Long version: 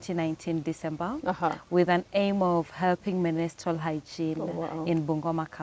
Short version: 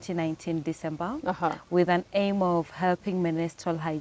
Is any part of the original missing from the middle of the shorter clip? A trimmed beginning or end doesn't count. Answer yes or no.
no